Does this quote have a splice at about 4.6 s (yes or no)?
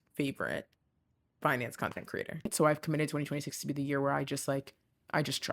no